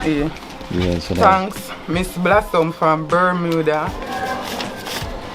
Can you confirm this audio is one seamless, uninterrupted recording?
no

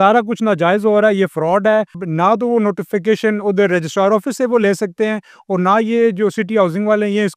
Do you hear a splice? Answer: yes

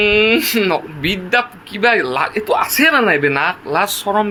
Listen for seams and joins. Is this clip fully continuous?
yes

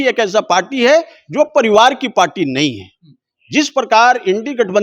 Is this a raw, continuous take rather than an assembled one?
yes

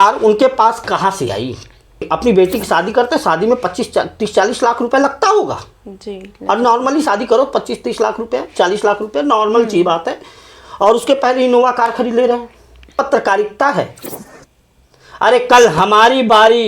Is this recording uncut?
no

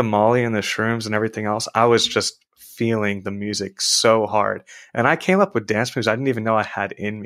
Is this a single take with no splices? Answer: yes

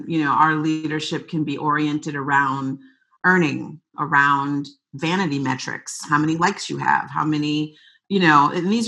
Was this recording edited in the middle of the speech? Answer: yes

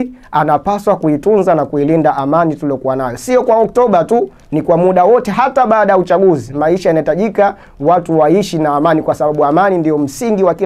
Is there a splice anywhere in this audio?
no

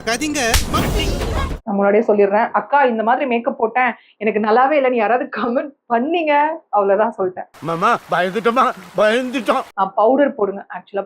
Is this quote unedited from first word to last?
no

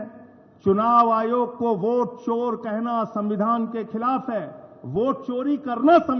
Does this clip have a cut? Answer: no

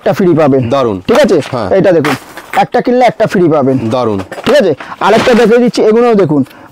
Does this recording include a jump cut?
no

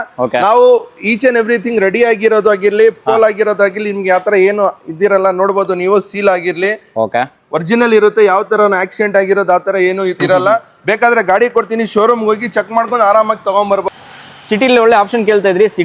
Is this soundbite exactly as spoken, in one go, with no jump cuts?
no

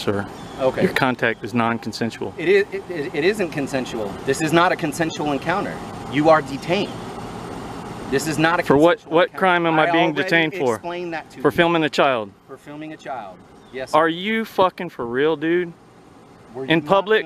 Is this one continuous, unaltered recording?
yes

